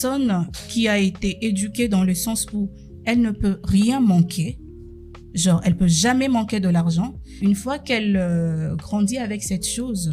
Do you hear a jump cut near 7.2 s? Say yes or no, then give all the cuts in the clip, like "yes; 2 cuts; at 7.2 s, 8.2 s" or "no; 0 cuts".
yes; 1 cut; at 7.2 s